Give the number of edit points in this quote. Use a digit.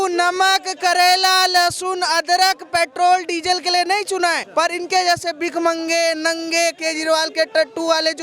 1